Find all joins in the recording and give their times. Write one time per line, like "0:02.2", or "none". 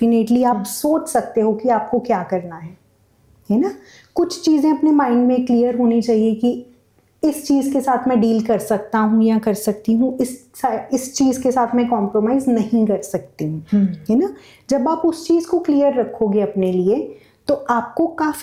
none